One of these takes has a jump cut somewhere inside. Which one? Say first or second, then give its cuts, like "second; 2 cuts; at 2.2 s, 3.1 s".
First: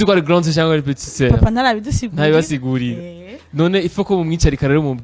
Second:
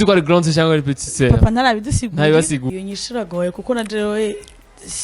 second; 1 cut; at 2.6 s